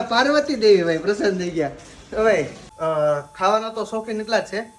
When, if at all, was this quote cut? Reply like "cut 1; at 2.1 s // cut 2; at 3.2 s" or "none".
cut 1; at 2.6 s